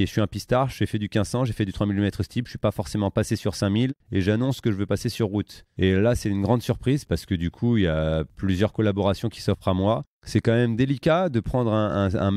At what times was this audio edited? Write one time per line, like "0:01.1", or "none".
0:04.0
0:05.6
0:07.0
0:08.3
0:10.1

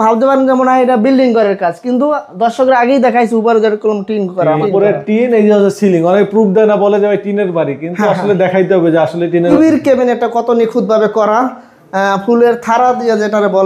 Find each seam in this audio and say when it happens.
0:04.6
0:09.5

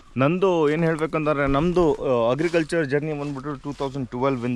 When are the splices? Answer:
none

